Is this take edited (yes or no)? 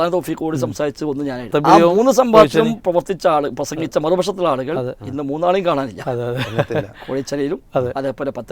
yes